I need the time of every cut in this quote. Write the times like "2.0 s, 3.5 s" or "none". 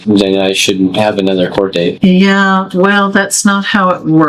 none